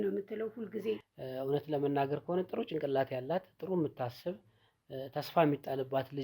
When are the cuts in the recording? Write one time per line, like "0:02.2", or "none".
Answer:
0:01.1